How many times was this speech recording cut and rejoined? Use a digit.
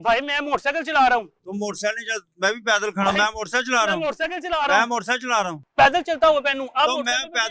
0